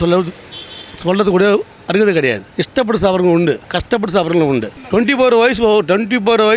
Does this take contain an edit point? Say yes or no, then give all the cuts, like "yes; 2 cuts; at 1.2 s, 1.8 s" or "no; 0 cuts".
yes; 3 cuts; at 2.4 s, 3.6 s, 4.8 s